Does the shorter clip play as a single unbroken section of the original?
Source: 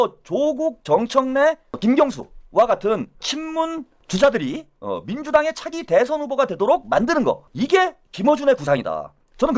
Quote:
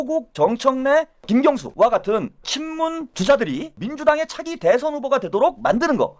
no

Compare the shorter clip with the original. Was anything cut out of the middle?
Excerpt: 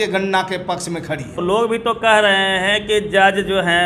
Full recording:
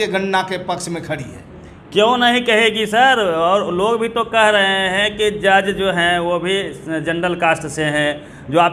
yes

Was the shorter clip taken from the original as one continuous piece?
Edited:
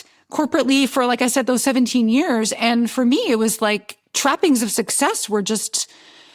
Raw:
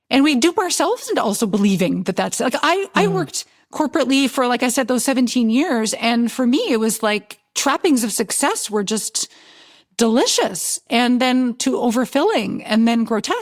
yes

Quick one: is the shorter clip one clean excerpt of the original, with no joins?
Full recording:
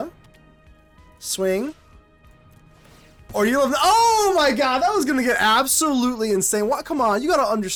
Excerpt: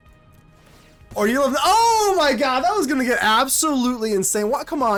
yes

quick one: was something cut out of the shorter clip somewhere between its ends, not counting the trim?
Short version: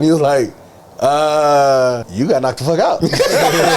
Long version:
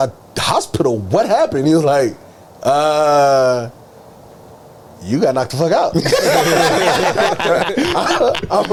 yes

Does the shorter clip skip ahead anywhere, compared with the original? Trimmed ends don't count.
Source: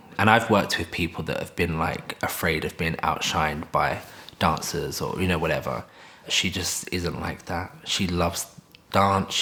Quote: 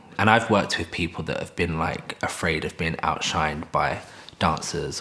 no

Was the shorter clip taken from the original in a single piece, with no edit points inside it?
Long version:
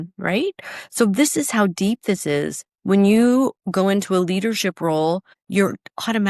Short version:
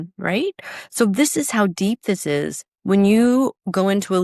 yes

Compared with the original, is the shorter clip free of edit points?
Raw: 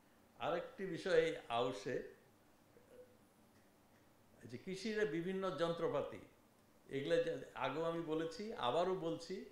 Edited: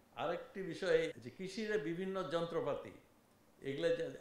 no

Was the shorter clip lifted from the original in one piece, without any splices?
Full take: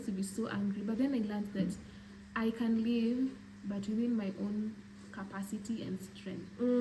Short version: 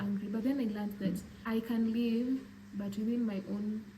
no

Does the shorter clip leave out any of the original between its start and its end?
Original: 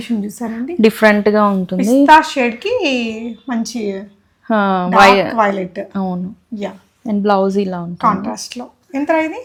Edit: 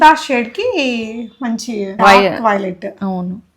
yes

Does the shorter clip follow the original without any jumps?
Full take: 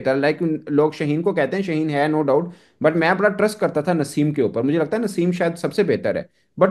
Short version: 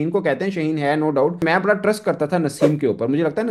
no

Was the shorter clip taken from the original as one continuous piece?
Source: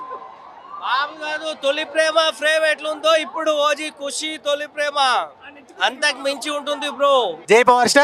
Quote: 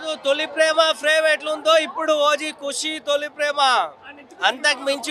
yes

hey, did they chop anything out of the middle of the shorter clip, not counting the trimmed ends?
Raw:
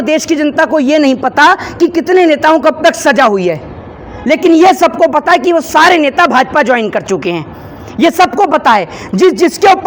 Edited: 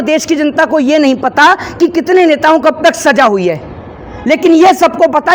no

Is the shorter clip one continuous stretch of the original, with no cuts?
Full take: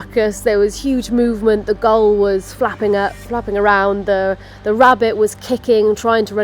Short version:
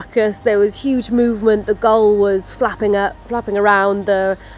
yes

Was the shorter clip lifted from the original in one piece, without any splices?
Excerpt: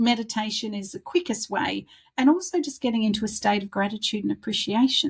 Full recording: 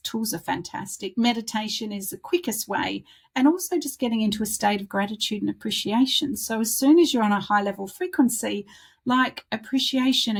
yes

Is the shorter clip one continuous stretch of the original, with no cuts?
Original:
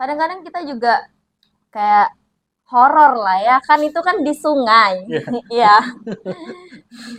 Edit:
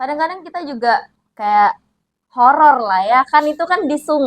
no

